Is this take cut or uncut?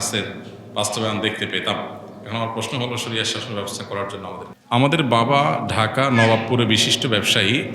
cut